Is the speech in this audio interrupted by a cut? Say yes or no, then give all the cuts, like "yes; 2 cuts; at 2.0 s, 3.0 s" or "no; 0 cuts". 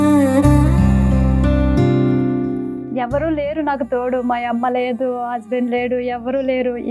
yes; 1 cut; at 2.9 s